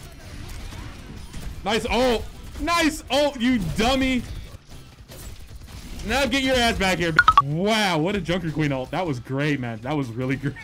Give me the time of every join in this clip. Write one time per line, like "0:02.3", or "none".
0:04.6
0:07.1